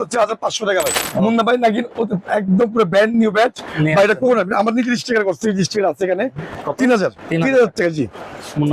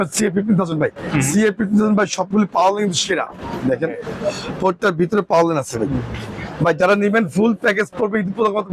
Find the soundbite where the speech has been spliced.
first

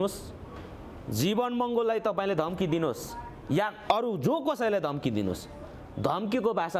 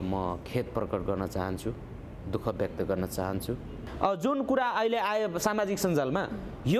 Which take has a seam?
second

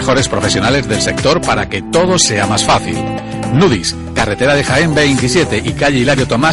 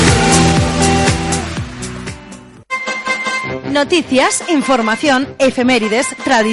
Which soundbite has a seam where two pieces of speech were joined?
second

